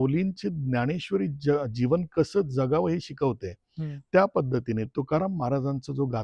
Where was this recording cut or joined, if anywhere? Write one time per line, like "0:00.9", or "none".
none